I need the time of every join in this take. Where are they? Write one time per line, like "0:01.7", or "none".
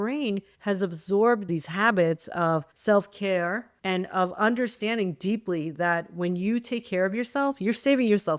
none